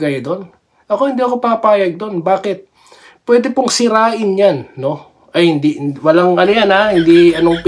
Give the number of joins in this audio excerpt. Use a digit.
0